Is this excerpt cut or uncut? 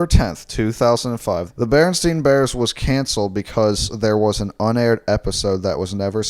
cut